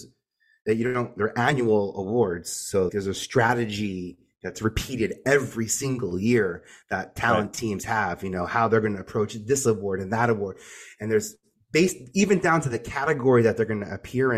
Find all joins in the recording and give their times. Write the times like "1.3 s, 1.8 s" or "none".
1.1 s, 2.9 s